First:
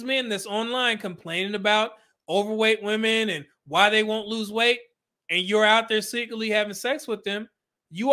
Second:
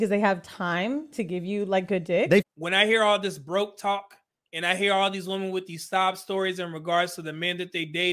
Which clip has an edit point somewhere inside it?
second; 1 cut; at 2.5 s

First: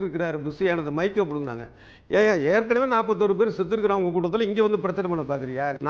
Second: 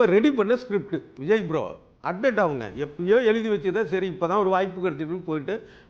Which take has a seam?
second; 1 cut; at 1.1 s

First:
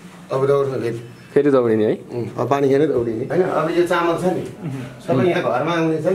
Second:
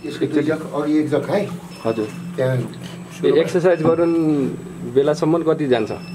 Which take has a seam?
first; 1 cut; at 3.2 s

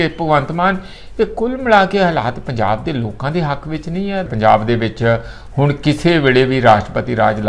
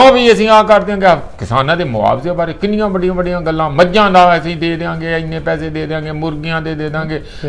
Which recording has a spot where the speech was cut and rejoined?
first; 1 cut; at 4.3 s

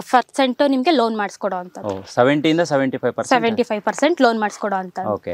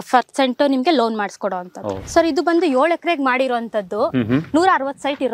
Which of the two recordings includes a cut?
second; 1 cut; at 2.0 s

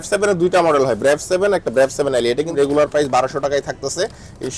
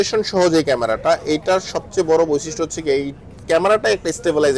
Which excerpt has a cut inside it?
first; 1 cut; at 2.5 s

